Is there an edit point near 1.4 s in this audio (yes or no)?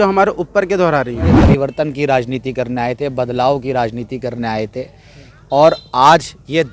yes